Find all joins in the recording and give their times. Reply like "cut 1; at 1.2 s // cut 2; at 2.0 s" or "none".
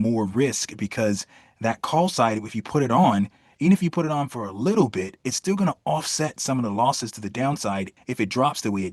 cut 1; at 7.9 s